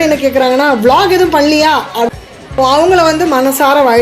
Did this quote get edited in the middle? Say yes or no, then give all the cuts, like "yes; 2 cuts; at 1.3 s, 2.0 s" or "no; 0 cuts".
yes; 1 cut; at 2.1 s